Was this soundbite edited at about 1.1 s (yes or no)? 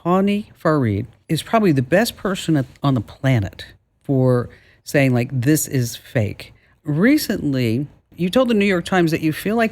yes